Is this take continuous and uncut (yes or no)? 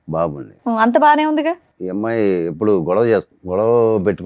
no